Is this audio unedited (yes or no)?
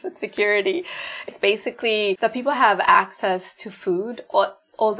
no